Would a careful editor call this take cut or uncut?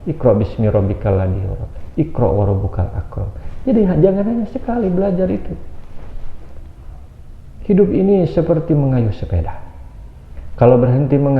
uncut